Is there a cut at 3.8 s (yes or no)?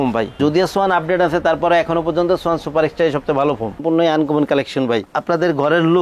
yes